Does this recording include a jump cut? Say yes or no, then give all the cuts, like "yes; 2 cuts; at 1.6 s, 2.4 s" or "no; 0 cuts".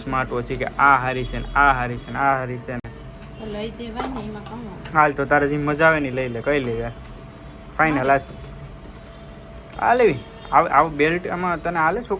no; 0 cuts